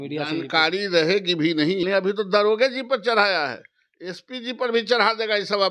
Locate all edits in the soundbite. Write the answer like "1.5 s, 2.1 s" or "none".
1.8 s